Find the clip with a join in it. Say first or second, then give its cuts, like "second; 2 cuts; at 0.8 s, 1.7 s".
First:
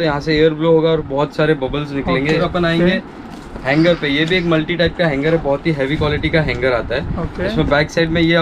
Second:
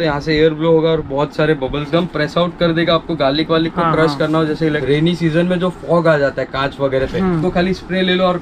second; 3 cuts; at 1.9 s, 4.6 s, 7.4 s